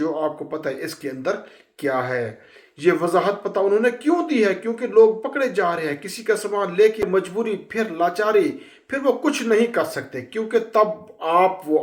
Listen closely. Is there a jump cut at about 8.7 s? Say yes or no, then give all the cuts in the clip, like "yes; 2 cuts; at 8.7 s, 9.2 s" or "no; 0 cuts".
no; 1 cut; at 7.0 s